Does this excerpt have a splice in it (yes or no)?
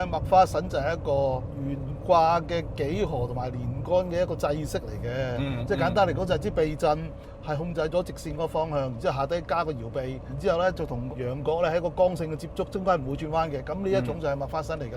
no